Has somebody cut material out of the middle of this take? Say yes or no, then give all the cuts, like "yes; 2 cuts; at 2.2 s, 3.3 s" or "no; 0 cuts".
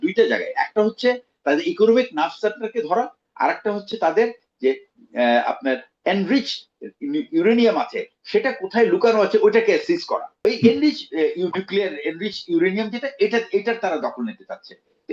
yes; 1 cut; at 10.3 s